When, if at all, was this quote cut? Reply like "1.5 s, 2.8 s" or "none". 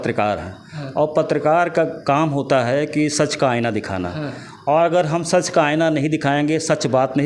none